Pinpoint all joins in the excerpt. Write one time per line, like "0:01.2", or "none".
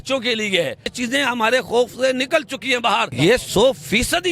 0:00.9
0:03.1